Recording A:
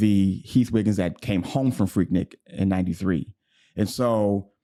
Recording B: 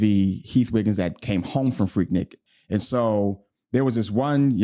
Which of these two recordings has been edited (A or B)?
B